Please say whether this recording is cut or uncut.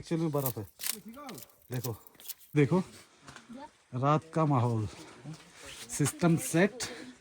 cut